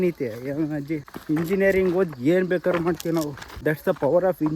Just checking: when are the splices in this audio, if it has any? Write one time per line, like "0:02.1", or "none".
0:01.1
0:03.4